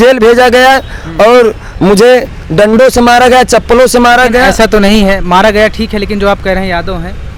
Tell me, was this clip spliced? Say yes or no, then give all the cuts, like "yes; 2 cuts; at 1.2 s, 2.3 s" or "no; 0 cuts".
no; 0 cuts